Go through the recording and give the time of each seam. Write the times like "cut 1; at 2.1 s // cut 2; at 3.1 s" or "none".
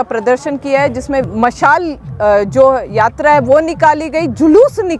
cut 1; at 1.2 s